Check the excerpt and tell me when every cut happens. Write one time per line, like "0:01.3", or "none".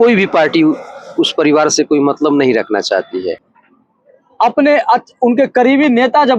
0:03.5